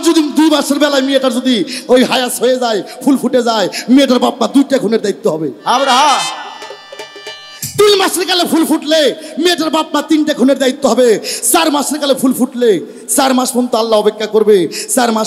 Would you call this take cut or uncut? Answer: uncut